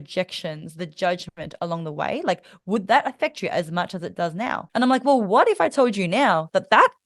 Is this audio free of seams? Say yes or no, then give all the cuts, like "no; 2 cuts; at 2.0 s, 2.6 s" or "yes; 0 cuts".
no; 1 cut; at 4.6 s